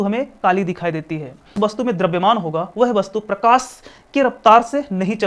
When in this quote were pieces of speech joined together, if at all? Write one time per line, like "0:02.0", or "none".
0:01.5